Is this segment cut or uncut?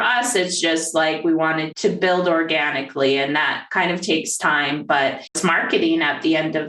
cut